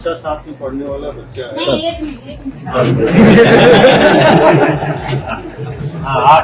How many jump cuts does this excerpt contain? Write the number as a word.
zero